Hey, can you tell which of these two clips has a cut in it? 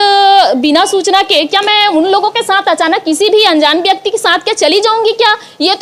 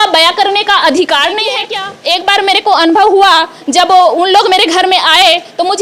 second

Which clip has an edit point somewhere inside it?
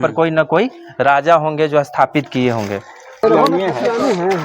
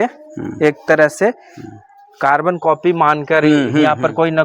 first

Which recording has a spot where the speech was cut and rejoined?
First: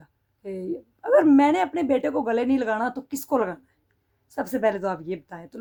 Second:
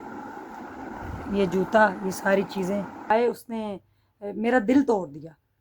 second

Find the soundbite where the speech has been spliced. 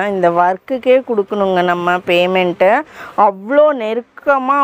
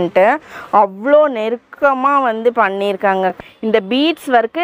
second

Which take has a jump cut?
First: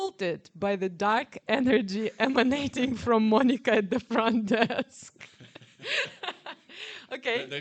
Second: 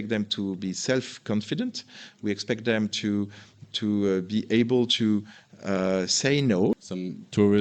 second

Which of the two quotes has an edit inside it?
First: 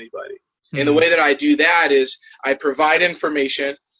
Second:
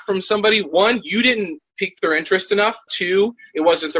second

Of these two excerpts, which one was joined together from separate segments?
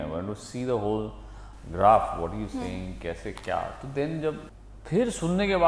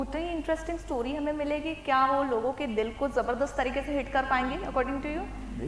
first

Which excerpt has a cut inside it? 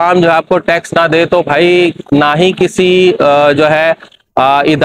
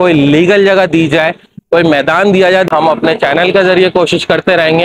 second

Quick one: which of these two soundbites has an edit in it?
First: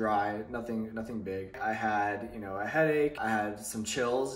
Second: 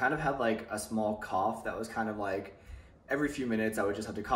first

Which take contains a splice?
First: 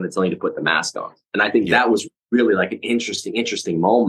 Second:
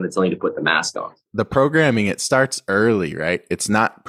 second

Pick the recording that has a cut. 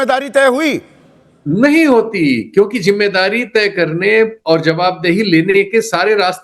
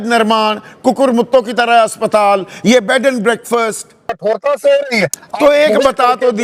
second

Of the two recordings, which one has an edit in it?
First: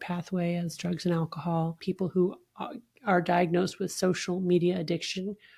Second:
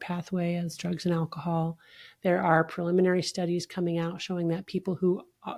first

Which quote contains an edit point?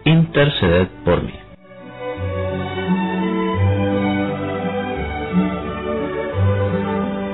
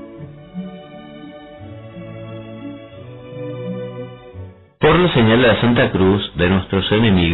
second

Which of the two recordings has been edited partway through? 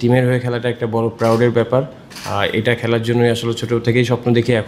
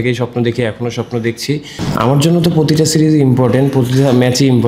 second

